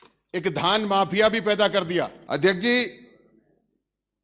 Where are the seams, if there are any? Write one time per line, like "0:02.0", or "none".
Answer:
0:02.2